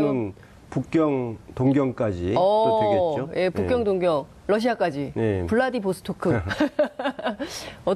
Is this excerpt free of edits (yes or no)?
no